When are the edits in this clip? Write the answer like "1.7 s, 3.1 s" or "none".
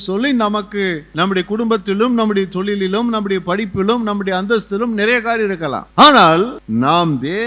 1.0 s, 5.8 s, 6.6 s